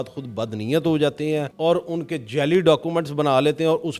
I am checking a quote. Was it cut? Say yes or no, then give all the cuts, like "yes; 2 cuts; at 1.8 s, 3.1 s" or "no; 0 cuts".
no; 0 cuts